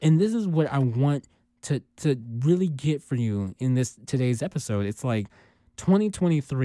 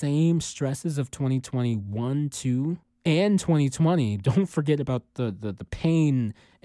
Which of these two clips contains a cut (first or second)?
second